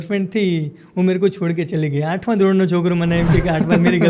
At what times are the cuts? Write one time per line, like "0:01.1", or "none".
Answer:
none